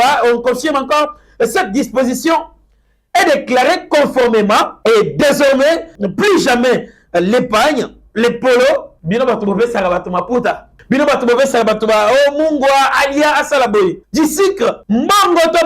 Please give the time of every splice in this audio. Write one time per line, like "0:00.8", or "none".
0:04.7
0:06.0
0:08.9
0:10.7
0:14.0
0:14.8